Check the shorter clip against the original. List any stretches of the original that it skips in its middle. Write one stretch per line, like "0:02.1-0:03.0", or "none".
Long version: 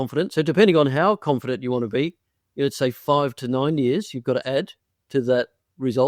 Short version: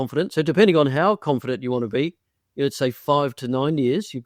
none